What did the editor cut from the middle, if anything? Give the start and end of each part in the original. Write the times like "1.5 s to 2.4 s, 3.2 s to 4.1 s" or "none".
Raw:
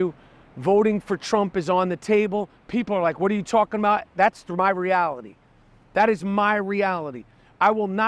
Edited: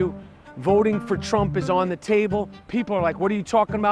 none